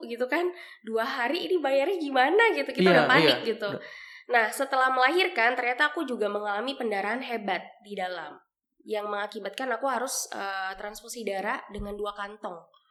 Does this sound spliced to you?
no; 0 cuts

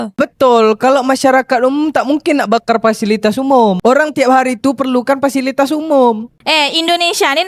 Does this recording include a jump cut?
no; 0 cuts

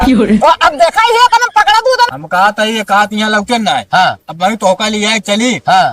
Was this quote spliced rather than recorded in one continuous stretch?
yes; 1 cut; at 2.1 s

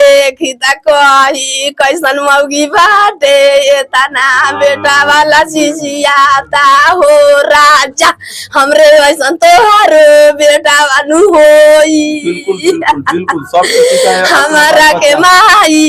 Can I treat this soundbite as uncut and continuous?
yes; 0 cuts

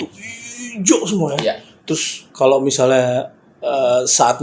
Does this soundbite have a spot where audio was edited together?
no; 0 cuts

